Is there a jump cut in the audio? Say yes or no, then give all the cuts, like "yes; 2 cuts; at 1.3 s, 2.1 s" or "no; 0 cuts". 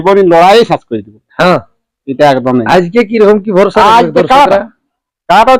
no; 0 cuts